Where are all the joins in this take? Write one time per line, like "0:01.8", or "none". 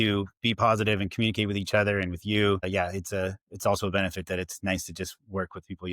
0:02.7